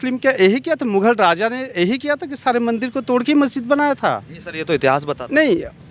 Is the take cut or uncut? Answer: uncut